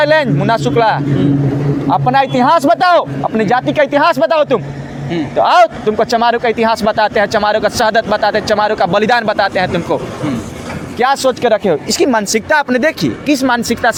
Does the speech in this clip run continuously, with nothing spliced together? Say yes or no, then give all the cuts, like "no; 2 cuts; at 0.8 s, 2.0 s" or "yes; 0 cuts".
yes; 0 cuts